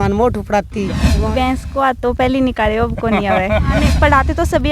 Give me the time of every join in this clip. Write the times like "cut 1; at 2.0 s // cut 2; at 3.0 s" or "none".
cut 1; at 1.0 s // cut 2; at 3.9 s